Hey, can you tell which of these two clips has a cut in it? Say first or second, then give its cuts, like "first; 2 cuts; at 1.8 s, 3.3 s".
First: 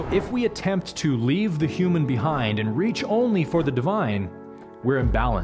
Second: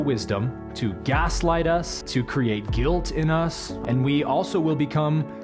second; 2 cuts; at 2.0 s, 3.7 s